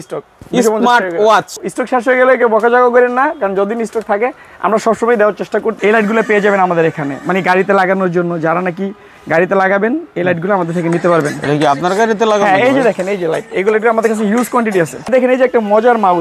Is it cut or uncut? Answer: cut